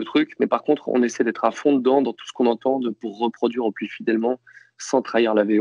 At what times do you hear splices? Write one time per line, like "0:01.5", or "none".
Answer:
none